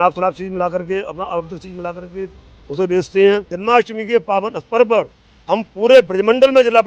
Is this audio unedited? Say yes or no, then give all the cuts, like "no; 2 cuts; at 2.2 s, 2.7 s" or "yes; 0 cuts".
no; 1 cut; at 3.5 s